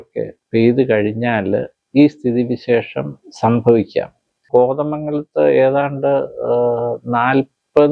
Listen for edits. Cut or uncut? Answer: cut